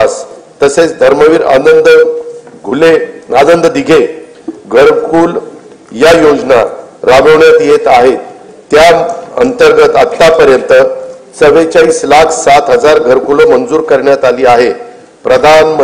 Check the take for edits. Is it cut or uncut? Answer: uncut